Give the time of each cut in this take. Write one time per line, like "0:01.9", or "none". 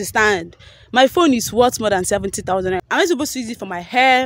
0:02.8